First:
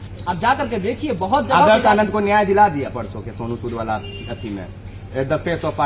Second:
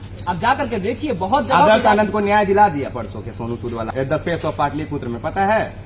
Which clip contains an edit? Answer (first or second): second